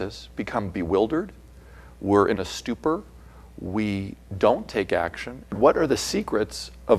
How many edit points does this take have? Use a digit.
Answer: 1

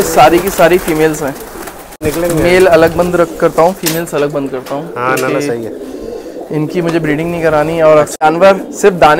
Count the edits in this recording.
2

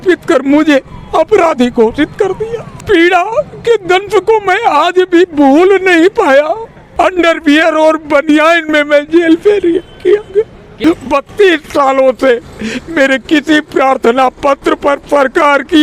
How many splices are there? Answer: 3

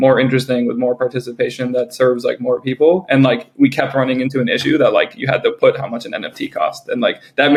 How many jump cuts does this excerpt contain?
0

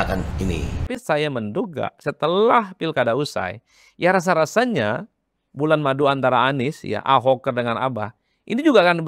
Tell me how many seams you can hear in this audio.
1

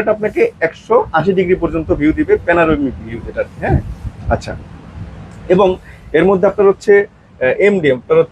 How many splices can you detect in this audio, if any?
0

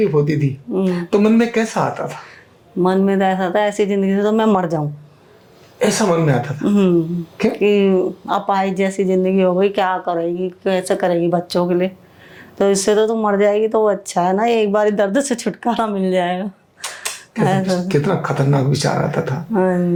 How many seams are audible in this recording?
0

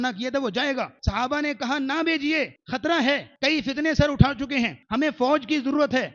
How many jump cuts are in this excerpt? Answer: 4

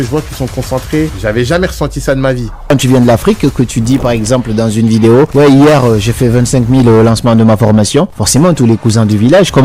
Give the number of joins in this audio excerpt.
4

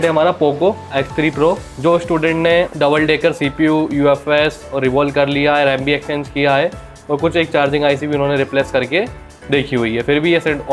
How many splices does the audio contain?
2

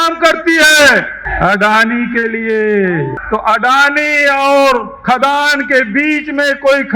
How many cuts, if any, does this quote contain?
2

